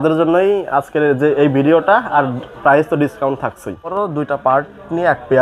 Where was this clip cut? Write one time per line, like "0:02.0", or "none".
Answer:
0:03.9